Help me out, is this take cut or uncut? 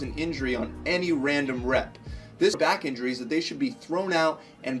cut